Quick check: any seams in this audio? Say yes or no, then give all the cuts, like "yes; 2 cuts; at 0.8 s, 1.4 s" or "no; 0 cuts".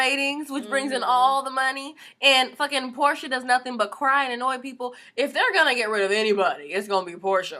yes; 1 cut; at 6.5 s